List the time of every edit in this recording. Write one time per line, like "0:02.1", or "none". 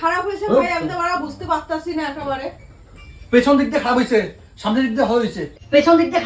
none